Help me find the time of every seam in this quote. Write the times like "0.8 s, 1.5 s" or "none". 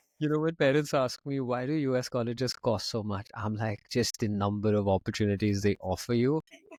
none